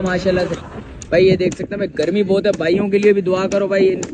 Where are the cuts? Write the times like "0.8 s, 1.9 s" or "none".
none